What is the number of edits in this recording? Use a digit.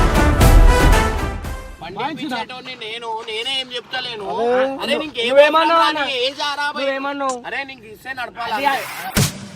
1